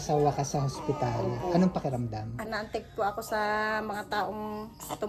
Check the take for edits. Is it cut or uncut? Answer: cut